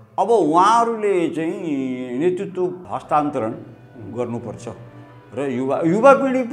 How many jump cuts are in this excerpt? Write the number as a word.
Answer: zero